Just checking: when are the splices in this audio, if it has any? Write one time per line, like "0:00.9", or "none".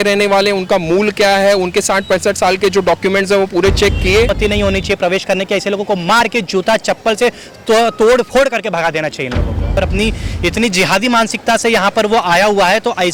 0:04.3
0:09.8